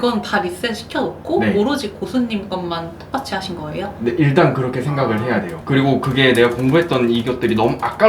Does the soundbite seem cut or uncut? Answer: cut